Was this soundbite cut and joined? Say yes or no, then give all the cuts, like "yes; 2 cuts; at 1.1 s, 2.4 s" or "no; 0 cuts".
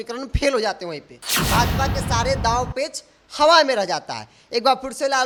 no; 0 cuts